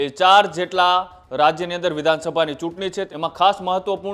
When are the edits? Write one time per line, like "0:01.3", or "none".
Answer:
0:03.1